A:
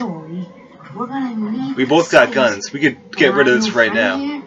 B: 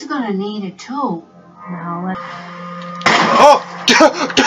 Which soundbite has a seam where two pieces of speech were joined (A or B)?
B